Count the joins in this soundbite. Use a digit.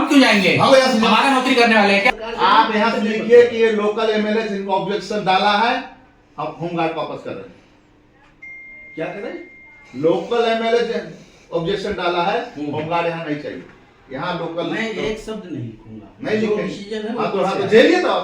1